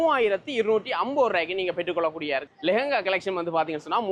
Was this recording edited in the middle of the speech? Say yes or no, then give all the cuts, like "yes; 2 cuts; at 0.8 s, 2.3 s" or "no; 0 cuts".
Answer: yes; 1 cut; at 2.5 s